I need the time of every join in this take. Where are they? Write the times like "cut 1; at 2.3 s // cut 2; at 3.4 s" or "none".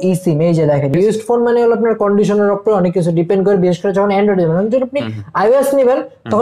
cut 1; at 0.9 s